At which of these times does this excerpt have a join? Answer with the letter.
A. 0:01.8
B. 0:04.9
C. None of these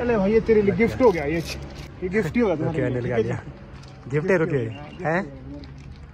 A